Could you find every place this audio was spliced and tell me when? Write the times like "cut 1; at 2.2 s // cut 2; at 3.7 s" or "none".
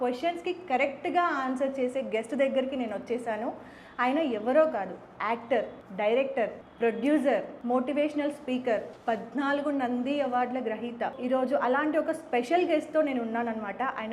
cut 1; at 5.8 s // cut 2; at 6.6 s // cut 3; at 7.5 s // cut 4; at 8.9 s // cut 5; at 11.2 s